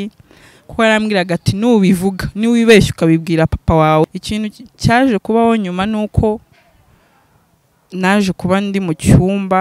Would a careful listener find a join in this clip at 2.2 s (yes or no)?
no